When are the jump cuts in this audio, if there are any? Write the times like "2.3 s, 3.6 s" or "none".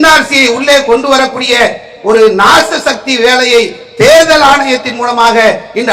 none